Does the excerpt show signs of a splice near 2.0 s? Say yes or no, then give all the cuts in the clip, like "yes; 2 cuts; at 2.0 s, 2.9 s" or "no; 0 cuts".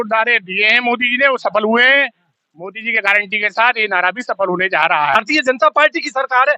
no; 1 cut; at 5.2 s